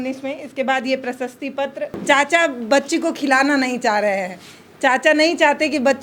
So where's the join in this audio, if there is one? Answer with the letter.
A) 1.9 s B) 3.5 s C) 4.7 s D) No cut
A